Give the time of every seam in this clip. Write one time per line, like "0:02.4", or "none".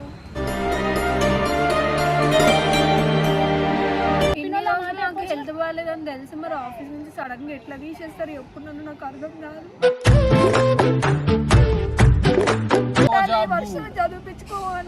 0:04.4
0:13.1